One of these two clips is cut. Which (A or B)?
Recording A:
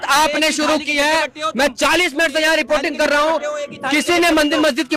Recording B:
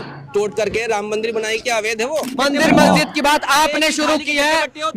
B